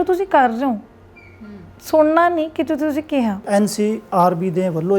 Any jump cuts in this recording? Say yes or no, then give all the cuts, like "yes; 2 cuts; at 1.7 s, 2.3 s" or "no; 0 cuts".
yes; 1 cut; at 3.4 s